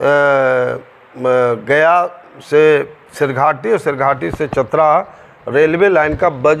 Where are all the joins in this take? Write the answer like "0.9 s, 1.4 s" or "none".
none